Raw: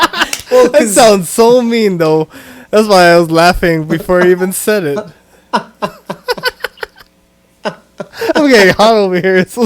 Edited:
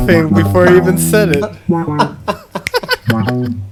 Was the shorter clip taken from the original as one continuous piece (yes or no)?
yes